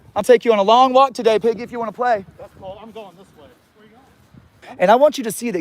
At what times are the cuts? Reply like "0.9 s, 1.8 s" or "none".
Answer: 4.7 s